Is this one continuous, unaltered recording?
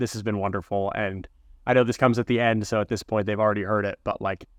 yes; 0 cuts

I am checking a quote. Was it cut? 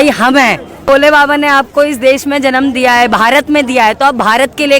yes; 1 cut; at 0.9 s

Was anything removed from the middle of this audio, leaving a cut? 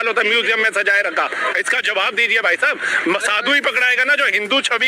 no; 0 cuts

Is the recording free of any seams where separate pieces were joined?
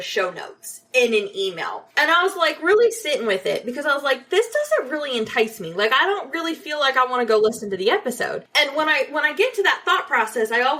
yes; 0 cuts

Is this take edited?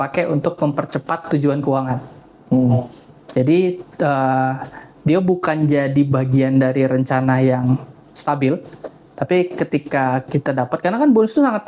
no; 0 cuts

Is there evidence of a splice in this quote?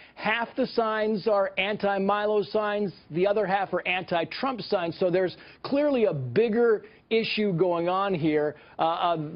no; 0 cuts

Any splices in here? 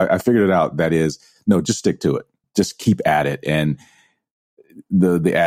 yes; 1 cut; at 2.4 s

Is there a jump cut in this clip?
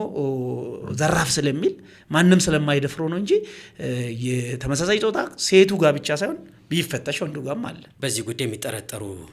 yes; 1 cut; at 7.8 s

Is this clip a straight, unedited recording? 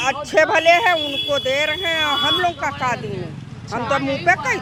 yes; 0 cuts

